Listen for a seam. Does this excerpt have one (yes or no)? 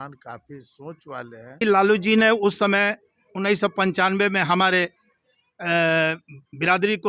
yes